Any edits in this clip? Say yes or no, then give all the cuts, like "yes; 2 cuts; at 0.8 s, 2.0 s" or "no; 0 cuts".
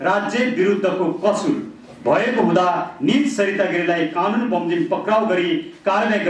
no; 0 cuts